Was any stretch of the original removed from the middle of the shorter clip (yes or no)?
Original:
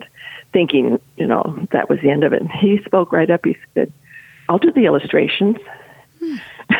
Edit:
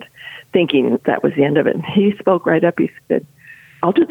yes